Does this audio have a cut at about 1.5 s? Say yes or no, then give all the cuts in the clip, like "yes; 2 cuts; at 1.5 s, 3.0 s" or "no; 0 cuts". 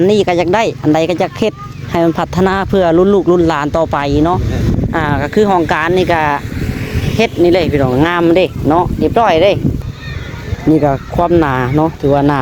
no; 1 cut; at 9.8 s